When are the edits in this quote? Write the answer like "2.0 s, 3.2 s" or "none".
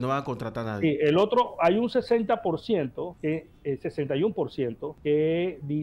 3.1 s, 4.9 s